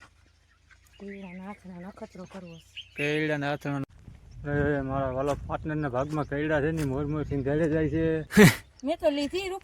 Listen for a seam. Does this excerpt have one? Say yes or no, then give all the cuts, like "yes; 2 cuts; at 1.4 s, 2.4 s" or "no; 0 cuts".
yes; 2 cuts; at 3.8 s, 8.2 s